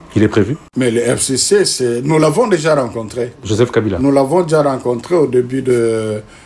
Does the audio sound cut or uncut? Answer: uncut